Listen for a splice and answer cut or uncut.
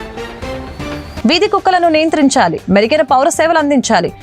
cut